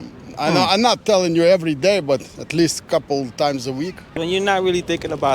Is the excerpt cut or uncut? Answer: cut